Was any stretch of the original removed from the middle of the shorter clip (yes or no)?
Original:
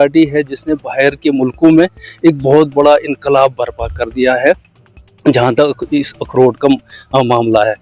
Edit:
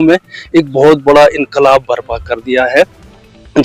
no